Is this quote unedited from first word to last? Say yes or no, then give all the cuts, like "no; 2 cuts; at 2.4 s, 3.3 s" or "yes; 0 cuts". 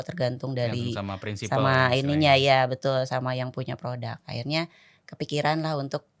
yes; 0 cuts